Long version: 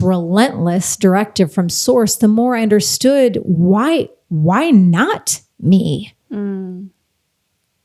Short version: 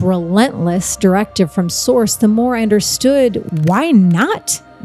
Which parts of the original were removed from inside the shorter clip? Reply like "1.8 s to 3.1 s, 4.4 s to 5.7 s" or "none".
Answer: 3.4 s to 4.2 s